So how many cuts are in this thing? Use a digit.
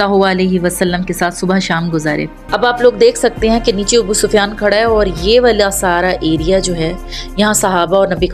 1